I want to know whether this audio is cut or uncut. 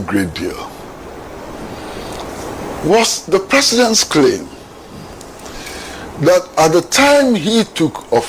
uncut